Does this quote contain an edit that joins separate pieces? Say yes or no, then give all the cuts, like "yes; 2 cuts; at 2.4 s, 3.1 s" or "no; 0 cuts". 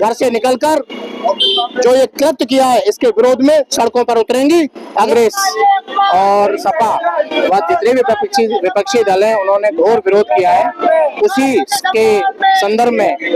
yes; 1 cut; at 5.1 s